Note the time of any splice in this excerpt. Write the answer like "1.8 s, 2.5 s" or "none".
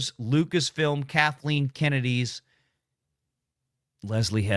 none